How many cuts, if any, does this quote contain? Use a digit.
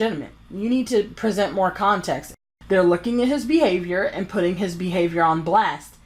1